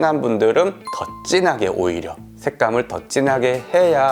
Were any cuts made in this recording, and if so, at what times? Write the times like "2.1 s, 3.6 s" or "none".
none

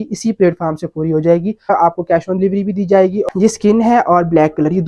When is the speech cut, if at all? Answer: 1.7 s, 3.1 s

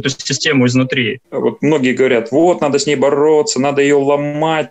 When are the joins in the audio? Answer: 1.2 s

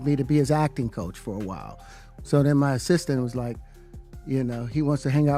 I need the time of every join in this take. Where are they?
2.1 s

